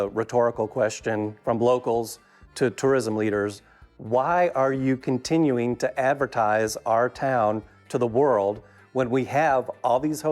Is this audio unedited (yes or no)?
no